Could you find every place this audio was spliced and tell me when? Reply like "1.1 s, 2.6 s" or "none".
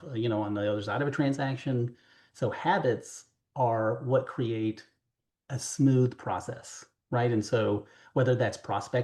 none